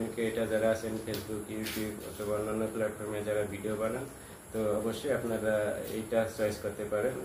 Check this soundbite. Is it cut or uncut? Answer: uncut